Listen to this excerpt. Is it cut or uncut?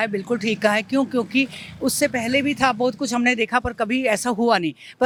uncut